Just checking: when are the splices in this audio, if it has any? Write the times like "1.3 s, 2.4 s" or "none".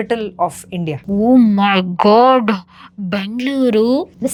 none